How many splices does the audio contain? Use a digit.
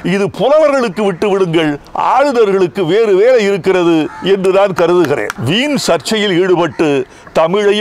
1